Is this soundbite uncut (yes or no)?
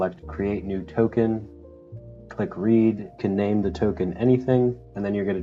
yes